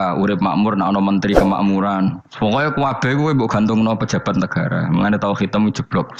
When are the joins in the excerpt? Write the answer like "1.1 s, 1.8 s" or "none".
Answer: none